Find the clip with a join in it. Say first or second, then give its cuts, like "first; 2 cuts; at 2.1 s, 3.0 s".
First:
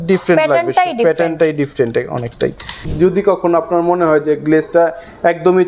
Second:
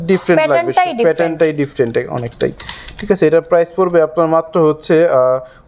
first; 1 cut; at 2.9 s